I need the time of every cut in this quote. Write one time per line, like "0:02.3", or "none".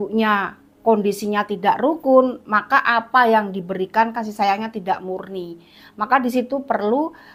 none